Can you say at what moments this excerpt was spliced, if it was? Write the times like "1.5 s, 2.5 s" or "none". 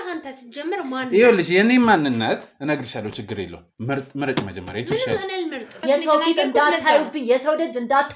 5.8 s

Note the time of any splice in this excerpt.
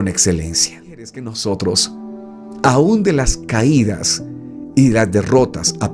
1.2 s

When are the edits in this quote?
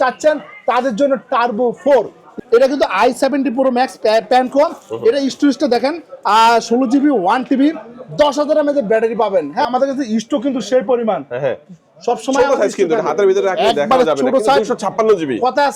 2.3 s, 9.7 s

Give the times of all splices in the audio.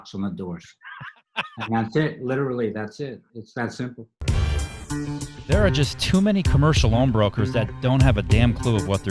4.1 s

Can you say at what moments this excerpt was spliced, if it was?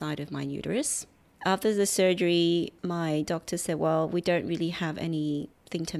1.4 s, 2.7 s

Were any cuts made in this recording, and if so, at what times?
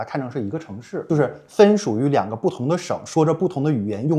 1.0 s

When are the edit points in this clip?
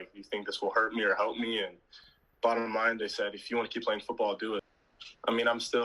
4.7 s

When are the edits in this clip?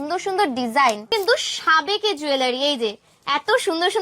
1.1 s

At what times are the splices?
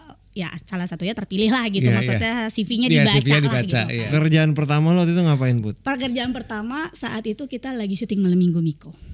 4.0 s

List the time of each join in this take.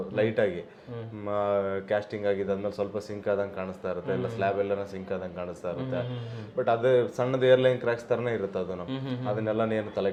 none

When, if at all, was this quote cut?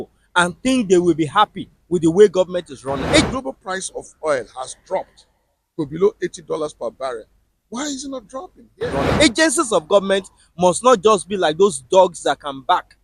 3.3 s, 8.8 s

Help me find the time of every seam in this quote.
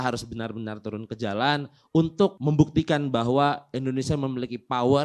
2.4 s

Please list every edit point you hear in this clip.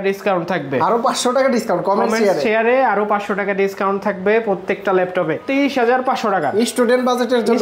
5.4 s

